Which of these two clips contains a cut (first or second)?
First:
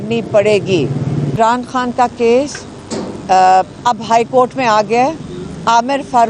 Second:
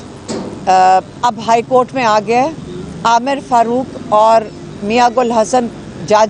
first